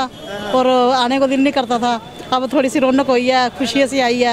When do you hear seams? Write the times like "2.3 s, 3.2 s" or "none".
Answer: none